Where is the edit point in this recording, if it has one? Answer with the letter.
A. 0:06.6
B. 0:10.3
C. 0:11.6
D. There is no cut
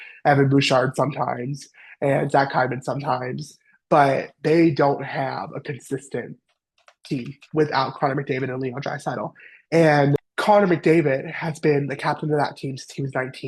B